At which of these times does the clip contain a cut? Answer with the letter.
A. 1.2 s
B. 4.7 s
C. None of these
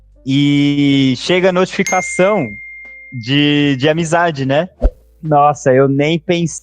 B